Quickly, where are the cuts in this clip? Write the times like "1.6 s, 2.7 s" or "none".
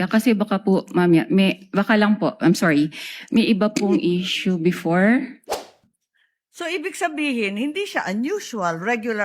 5.8 s